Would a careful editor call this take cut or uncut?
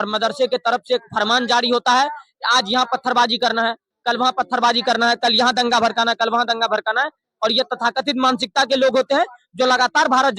uncut